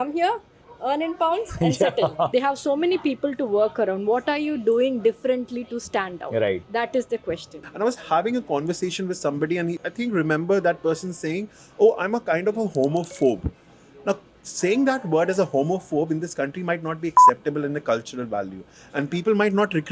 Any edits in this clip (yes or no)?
yes